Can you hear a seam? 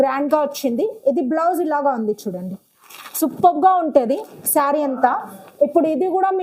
no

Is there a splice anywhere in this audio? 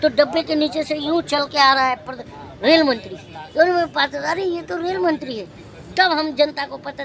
no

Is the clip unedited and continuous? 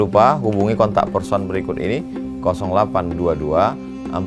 yes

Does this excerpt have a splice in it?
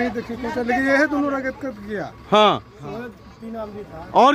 no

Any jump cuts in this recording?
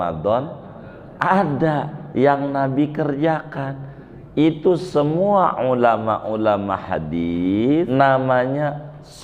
yes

